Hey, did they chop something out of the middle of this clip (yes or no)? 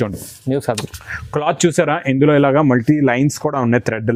no